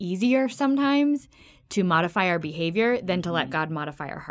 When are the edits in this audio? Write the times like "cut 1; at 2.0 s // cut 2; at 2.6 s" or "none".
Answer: none